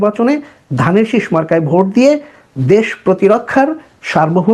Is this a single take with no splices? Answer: yes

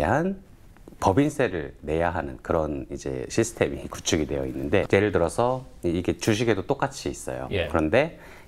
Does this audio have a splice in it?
no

